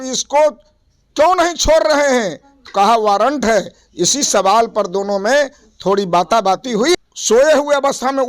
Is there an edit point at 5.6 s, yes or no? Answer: no